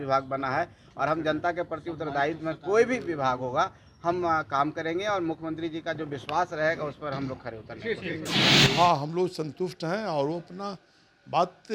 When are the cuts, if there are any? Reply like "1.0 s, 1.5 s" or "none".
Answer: 8.4 s